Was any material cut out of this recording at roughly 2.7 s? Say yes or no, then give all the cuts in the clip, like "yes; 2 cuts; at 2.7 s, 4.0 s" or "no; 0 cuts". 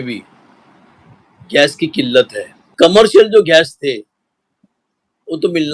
yes; 1 cut; at 2.7 s